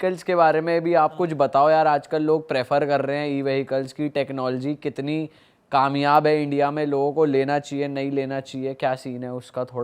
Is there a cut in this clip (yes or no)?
no